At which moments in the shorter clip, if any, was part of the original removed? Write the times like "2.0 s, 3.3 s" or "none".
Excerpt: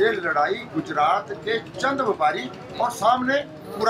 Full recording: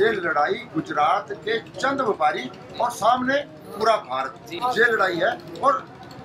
none